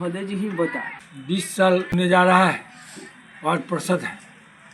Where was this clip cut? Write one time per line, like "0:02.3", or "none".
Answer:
0:00.9
0:01.9